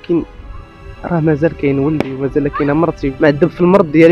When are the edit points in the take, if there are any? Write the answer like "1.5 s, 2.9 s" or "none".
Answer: 3.1 s